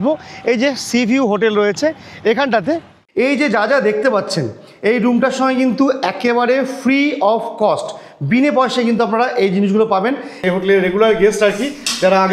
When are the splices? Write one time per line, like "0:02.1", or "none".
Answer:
0:03.0
0:10.4